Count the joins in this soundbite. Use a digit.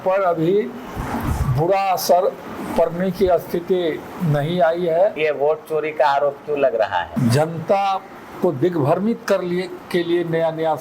2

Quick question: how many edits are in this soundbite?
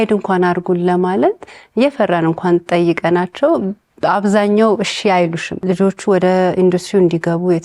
1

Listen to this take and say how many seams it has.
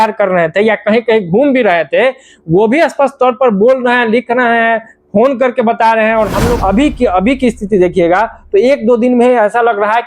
1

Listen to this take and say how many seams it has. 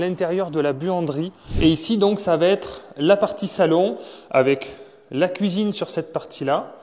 1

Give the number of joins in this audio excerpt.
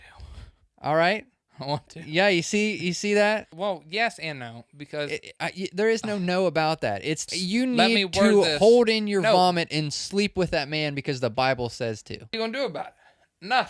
3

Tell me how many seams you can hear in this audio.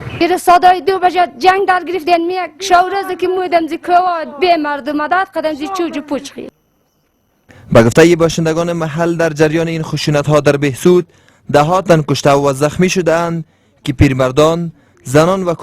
1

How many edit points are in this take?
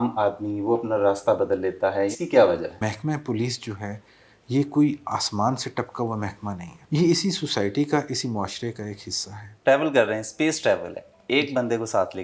4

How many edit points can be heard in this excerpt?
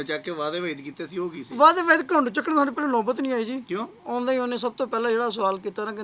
1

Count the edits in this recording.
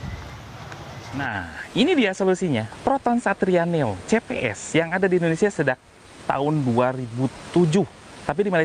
1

